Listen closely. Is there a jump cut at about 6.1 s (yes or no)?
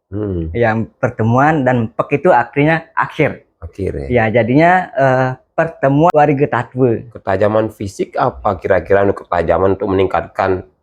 yes